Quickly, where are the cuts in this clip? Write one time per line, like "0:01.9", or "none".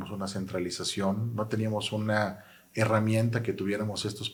none